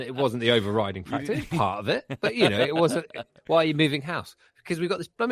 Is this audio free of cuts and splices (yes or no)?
yes